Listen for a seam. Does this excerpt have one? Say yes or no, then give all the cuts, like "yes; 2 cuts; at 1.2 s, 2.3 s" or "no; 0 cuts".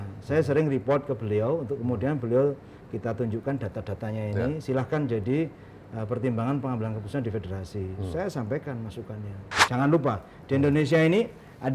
yes; 1 cut; at 9.5 s